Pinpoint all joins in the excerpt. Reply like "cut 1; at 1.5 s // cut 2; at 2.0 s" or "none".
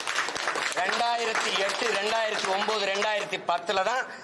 none